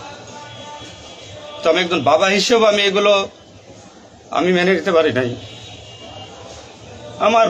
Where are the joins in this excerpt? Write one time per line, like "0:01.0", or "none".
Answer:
none